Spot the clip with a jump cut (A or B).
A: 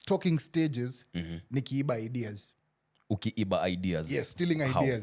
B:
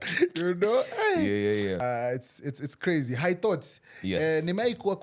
B